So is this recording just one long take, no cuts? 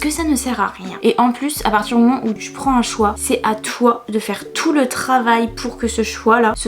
yes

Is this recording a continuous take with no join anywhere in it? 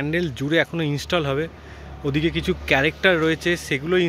yes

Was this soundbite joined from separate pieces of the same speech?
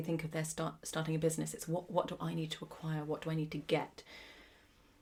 no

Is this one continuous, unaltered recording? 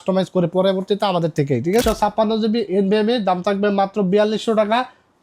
no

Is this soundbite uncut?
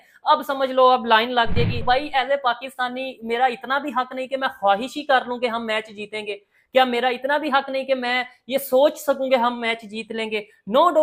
no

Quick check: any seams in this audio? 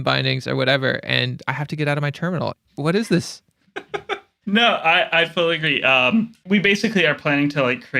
yes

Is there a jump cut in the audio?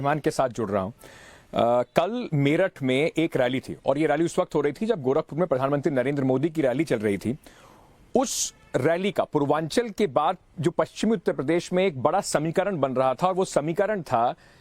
yes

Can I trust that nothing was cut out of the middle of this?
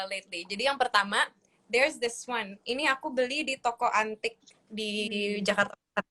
yes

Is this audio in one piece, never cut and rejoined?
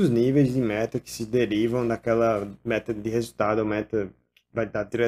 yes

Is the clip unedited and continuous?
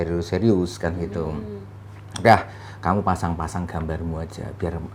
yes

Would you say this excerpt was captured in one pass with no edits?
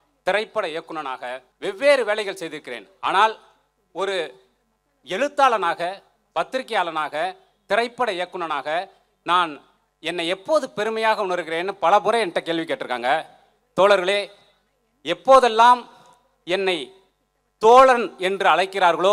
no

